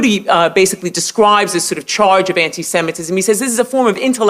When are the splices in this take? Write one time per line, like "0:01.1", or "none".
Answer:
0:01.8